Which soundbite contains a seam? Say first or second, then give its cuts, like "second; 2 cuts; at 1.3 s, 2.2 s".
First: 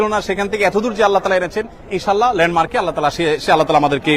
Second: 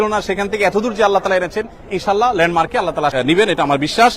second; 1 cut; at 3.1 s